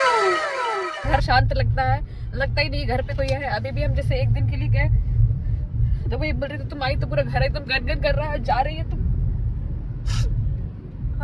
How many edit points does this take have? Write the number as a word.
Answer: one